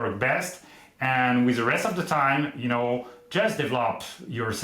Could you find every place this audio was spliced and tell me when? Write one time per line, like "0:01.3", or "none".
none

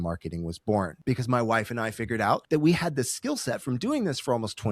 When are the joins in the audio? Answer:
0:01.0
0:02.4

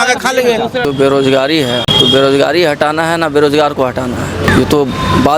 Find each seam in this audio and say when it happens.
0:00.9
0:01.9
0:04.5

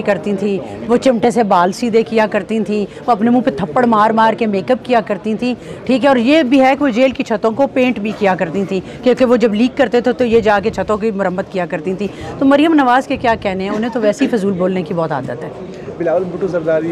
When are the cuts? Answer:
none

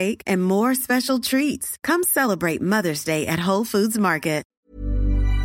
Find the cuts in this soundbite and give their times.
0:04.5

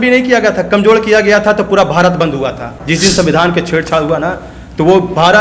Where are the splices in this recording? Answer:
0:02.7

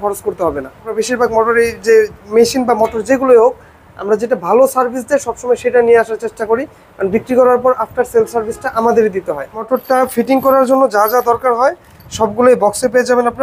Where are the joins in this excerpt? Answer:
0:00.9
0:09.5

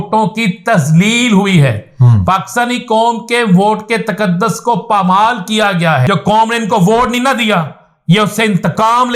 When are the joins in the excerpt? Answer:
0:06.0

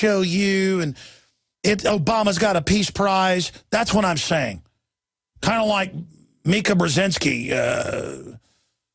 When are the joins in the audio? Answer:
0:02.3

